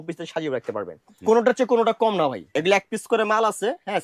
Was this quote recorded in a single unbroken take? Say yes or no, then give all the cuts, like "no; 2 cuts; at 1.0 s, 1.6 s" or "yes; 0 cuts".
no; 2 cuts; at 1.1 s, 2.5 s